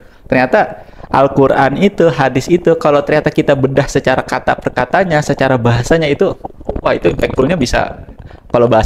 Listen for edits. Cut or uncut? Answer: uncut